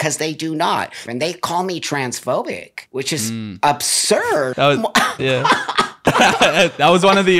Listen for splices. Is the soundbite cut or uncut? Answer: cut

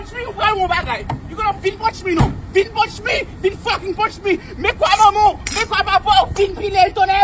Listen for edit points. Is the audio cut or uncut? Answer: cut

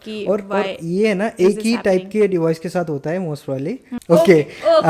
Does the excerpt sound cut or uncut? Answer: cut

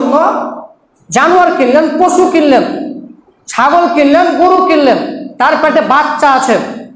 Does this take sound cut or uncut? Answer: uncut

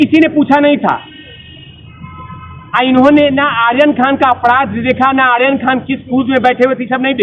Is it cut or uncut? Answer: uncut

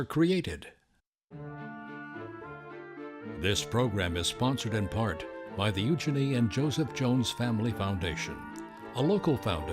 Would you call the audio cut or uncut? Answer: cut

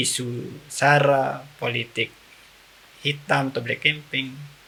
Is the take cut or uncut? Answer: uncut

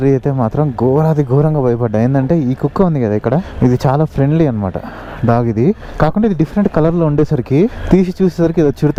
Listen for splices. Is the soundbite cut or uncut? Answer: uncut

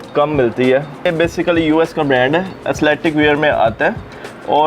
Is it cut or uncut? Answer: cut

